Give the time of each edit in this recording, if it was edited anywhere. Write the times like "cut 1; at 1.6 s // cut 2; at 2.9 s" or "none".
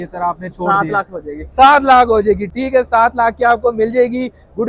none